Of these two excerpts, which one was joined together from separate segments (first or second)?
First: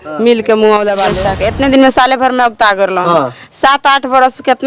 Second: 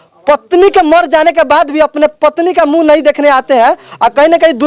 first